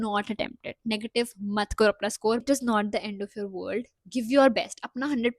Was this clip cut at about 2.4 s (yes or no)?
yes